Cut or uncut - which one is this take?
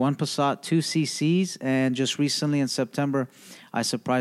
uncut